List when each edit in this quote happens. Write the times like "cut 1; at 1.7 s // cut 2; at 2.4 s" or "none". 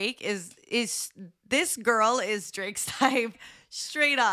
cut 1; at 3.4 s